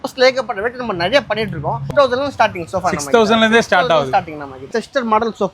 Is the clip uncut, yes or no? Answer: no